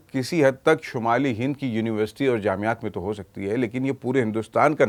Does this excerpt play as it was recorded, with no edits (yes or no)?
yes